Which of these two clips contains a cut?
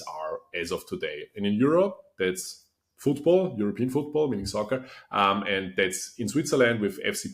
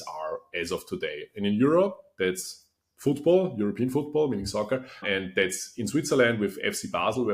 second; 1 cut; at 5.0 s

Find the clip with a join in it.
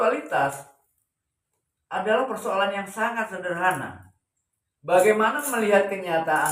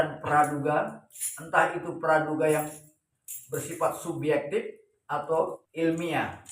second; 1 cut; at 5.6 s

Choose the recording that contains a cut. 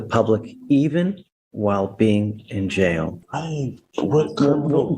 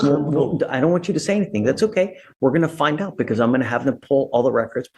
first; 1 cut; at 3.2 s

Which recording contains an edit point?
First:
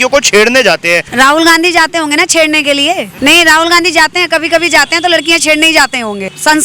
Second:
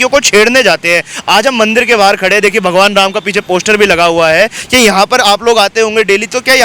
first; 2 cuts; at 1.1 s, 3.1 s

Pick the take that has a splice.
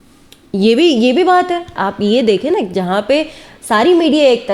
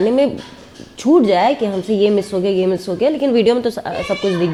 first; 1 cut; at 1.7 s

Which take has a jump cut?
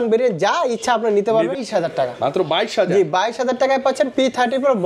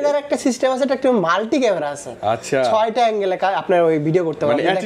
first; 1 cut; at 1.6 s

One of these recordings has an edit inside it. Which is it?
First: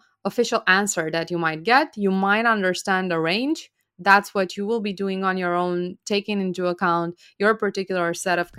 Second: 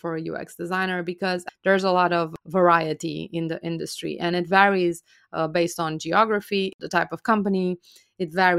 second; 3 cuts; at 1.4 s, 2.3 s, 6.8 s

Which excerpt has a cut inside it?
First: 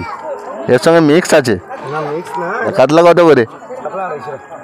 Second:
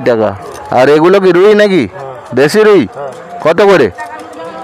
first; 1 cut; at 2.6 s

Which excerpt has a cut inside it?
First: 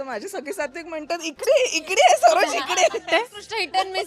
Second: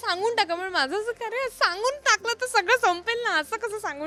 first; 1 cut; at 3.1 s

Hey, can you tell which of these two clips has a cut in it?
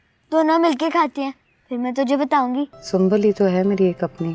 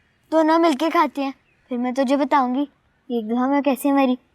first; 1 cut; at 2.8 s

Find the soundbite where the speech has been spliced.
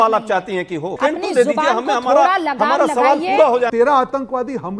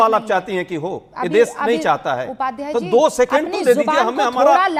first; 2 cuts; at 1.0 s, 3.7 s

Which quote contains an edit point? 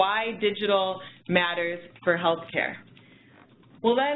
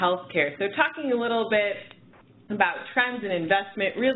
first; 1 cut; at 2.4 s

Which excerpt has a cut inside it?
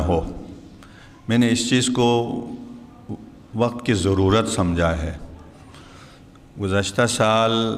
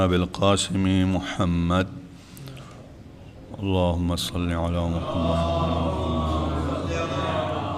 second; 1 cut; at 6.5 s

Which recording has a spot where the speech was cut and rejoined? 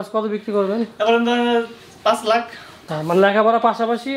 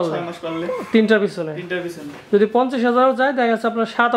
first; 1 cut; at 2.9 s

